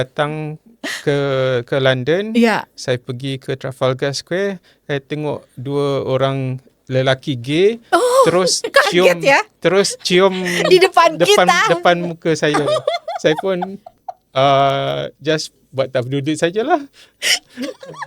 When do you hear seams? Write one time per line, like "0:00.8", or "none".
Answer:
none

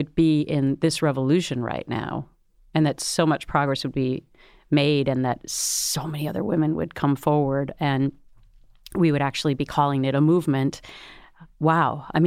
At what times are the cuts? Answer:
none

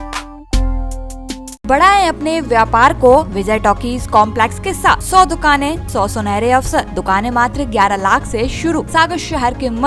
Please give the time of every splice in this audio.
0:01.6
0:03.3
0:05.0
0:05.8
0:06.9
0:08.9

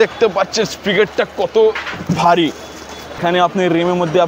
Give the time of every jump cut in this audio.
0:03.0

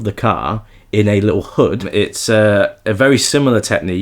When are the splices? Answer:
0:01.9

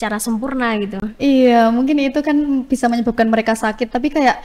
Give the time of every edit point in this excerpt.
none

